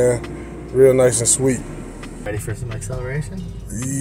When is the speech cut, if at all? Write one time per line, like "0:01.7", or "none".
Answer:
0:02.2